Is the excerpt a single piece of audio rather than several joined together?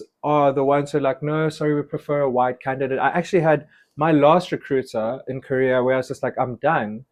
yes; 0 cuts

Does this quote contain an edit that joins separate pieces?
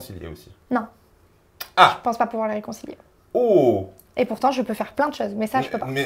no; 0 cuts

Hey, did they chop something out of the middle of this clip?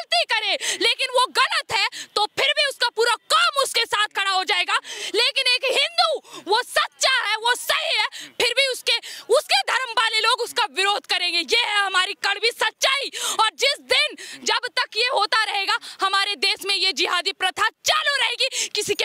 no; 0 cuts

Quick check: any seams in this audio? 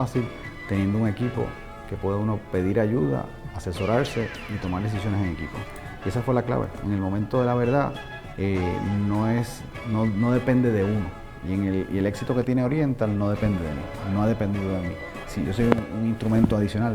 no; 0 cuts

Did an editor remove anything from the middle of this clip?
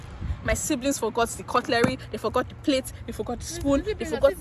no; 0 cuts

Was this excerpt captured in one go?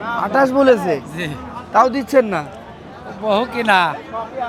yes; 0 cuts

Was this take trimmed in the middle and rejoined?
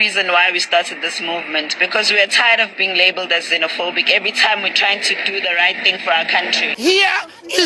yes; 1 cut; at 6.7 s

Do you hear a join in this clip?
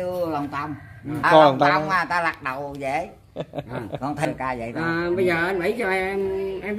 yes; 2 cuts; at 1.2 s, 4.3 s

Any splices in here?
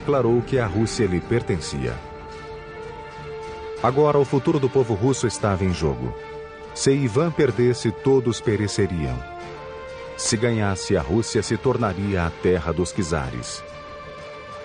no; 0 cuts

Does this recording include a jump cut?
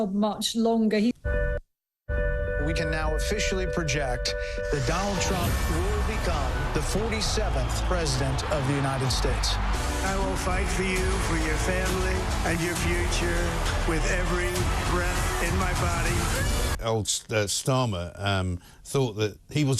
yes; 3 cuts; at 1.2 s, 9.7 s, 16.8 s

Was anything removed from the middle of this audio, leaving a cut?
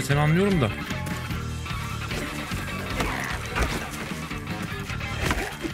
no; 0 cuts

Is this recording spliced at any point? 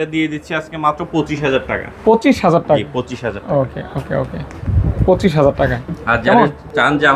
no; 0 cuts

